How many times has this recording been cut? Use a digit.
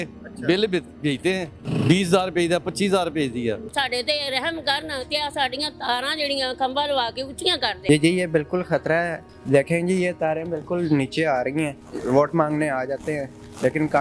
3